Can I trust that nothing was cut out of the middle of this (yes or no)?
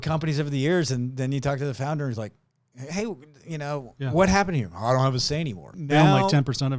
no